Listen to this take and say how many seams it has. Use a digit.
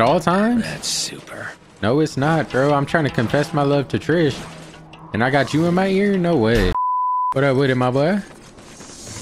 1